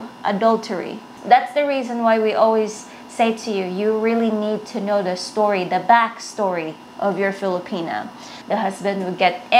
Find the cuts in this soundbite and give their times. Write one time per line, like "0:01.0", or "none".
0:01.1
0:08.3